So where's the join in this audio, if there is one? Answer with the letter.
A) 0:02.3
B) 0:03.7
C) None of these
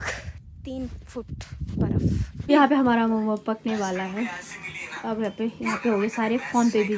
A